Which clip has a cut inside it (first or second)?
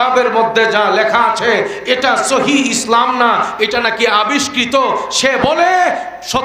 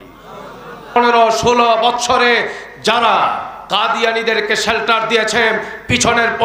second